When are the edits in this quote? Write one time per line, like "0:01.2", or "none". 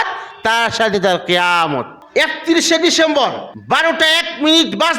0:02.0
0:03.5